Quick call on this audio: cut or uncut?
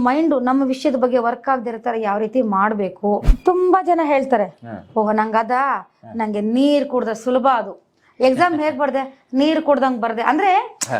cut